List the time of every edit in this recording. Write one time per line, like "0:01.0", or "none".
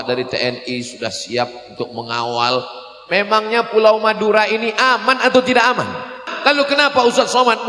0:06.2

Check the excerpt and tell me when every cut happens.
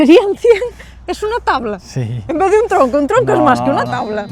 none

